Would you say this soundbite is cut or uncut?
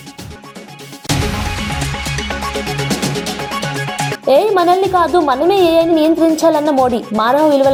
uncut